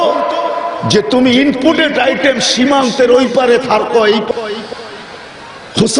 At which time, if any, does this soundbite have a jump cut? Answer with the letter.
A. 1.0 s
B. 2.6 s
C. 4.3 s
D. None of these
C